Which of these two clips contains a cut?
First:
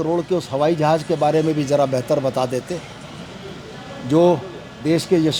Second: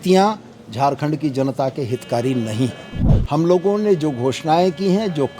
second; 1 cut; at 2.9 s

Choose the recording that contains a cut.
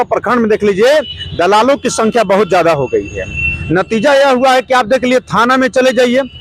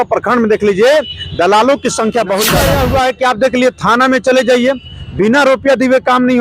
second; 1 cut; at 2.5 s

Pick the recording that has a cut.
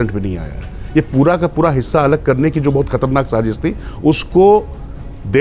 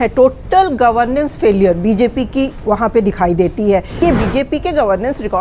second; 1 cut; at 4.0 s

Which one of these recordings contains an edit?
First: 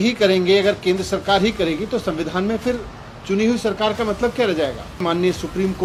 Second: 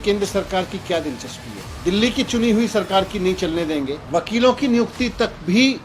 second; 2 cuts; at 1.6 s, 4.0 s

